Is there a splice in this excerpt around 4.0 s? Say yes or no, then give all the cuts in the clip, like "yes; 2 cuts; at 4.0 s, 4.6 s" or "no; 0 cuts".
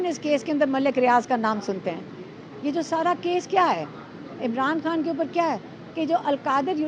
no; 0 cuts